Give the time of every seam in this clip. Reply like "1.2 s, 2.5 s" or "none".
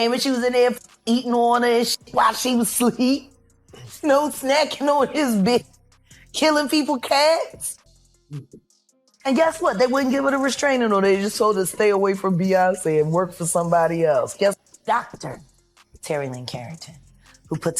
14.6 s